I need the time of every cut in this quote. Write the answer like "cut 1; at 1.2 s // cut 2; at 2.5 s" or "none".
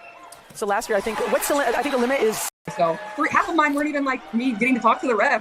cut 1; at 2.6 s